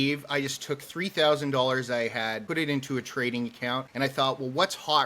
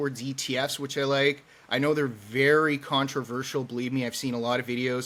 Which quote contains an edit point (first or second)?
first